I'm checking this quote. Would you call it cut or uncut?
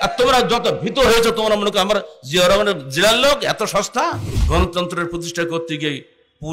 cut